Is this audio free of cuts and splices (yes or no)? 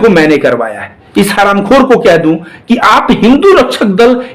no